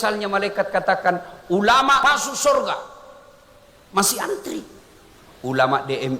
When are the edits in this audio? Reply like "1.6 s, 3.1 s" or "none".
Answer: 2.0 s